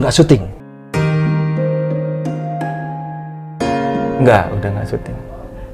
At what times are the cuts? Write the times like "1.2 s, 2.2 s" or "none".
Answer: 4.2 s